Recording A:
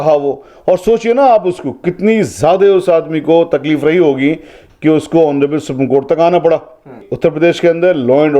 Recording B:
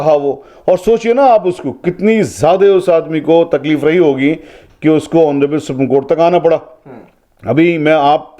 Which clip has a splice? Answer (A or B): A